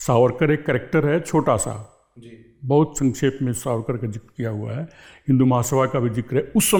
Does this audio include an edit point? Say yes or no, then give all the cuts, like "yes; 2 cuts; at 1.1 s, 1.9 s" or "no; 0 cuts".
no; 0 cuts